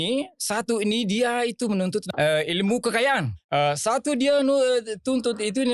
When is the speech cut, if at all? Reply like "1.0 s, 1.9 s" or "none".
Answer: 2.1 s, 3.3 s